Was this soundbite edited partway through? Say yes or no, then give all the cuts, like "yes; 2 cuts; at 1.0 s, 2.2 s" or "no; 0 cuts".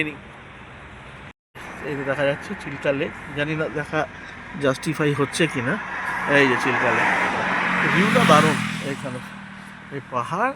yes; 1 cut; at 1.5 s